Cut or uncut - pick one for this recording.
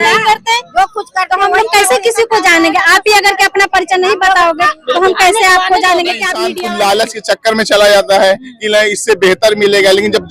cut